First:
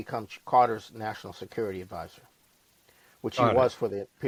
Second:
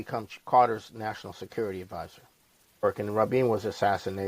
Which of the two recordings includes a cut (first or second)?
second